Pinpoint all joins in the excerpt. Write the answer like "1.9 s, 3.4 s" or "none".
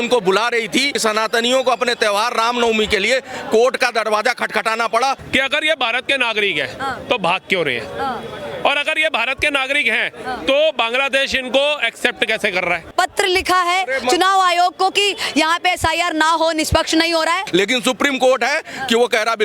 0.9 s, 5.2 s, 12.9 s, 17.4 s